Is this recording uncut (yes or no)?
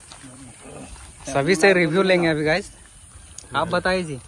yes